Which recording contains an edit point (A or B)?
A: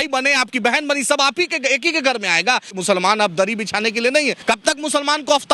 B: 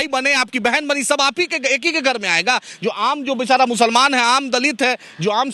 A